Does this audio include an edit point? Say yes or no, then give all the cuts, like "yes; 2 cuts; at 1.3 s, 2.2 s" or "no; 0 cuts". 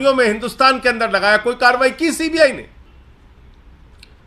yes; 1 cut; at 2.9 s